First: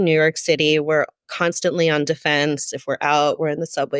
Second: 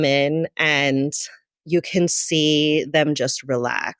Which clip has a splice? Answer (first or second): first